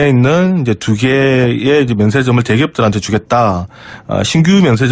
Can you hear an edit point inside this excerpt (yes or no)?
no